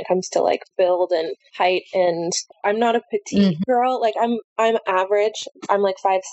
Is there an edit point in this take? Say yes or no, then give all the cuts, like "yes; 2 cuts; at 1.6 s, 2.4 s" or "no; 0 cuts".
yes; 1 cut; at 2.4 s